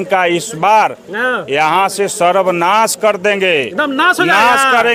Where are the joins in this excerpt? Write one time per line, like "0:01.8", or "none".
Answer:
none